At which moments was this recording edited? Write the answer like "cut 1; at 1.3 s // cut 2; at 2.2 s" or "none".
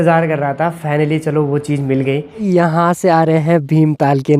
cut 1; at 2.4 s